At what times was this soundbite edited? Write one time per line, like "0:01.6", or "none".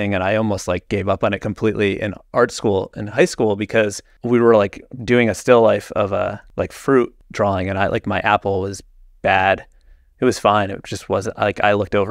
0:04.1
0:06.4
0:07.2